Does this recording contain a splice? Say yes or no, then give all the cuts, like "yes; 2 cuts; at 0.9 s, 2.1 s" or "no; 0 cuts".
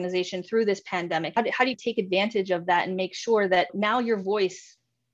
yes; 1 cut; at 1.3 s